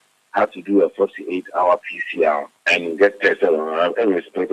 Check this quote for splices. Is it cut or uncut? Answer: cut